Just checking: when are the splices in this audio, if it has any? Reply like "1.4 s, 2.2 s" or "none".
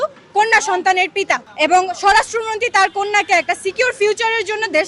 1.4 s